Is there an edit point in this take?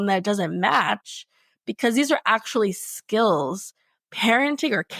yes; 1 cut; at 3.9 s

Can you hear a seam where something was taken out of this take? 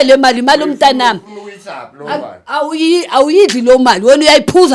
no; 0 cuts

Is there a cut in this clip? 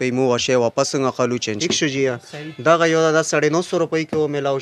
yes; 1 cut; at 1.6 s

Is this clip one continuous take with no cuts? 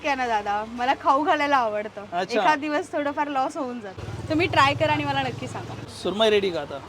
no; 2 cuts; at 3.9 s, 5.8 s

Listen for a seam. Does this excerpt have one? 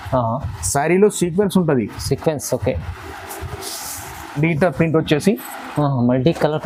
no; 0 cuts

